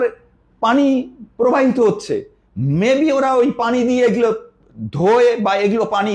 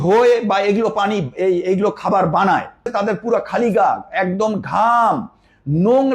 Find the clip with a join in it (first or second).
second